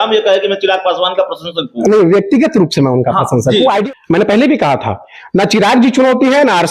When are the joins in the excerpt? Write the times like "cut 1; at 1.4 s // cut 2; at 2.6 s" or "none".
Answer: cut 1; at 3.8 s